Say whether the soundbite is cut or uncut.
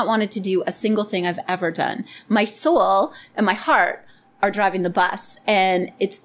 uncut